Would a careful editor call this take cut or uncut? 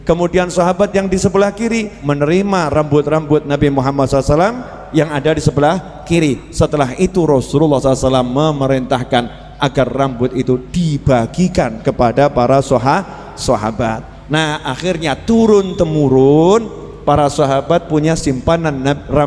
uncut